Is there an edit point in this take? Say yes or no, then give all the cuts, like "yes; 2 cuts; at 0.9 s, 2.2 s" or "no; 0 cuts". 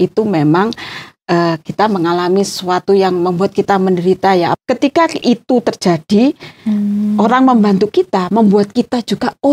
yes; 1 cut; at 4.5 s